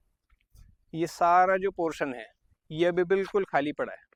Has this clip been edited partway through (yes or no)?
no